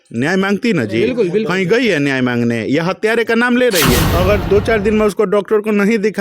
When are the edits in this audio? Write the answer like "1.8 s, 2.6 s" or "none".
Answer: 3.9 s